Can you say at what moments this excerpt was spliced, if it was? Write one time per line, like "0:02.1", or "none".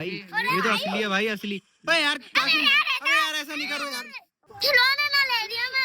0:04.4

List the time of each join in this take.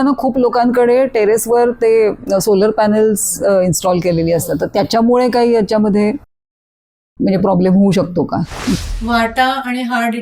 0:08.9

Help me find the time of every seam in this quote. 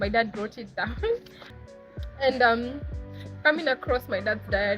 0:01.5

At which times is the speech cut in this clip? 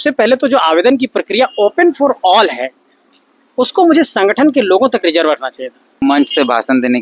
0:06.0

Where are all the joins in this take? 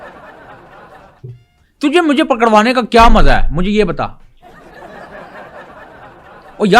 0:01.0

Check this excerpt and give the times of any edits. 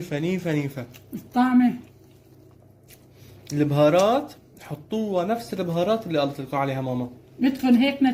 none

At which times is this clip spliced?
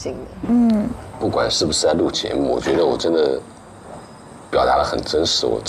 0:01.0

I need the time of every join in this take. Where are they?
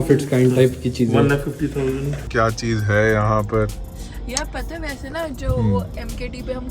0:02.3

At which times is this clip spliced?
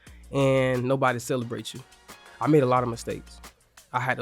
0:02.2

